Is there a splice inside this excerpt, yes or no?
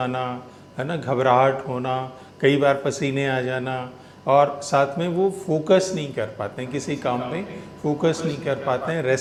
no